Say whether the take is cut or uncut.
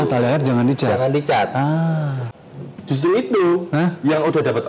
cut